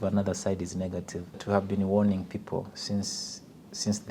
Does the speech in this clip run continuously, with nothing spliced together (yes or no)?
no